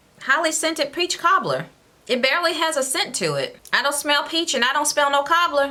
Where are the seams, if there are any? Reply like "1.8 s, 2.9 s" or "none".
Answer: none